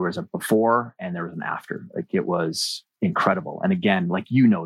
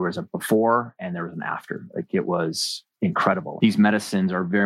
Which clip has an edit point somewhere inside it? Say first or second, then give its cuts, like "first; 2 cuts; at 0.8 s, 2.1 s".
second; 1 cut; at 3.5 s